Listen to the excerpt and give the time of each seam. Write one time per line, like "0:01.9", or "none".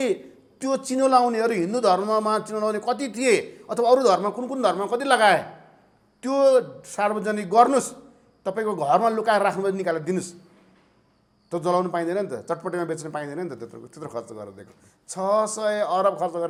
none